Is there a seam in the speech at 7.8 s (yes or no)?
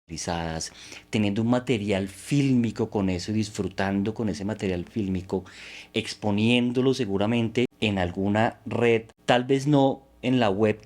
yes